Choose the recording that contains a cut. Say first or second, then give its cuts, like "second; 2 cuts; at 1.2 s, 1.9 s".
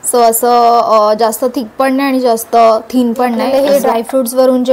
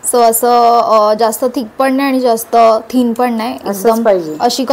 first; 1 cut; at 3.4 s